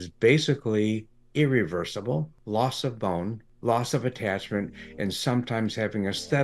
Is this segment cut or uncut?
cut